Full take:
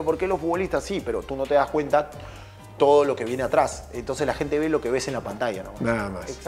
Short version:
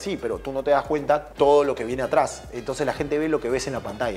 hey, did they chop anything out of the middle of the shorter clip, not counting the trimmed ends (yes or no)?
yes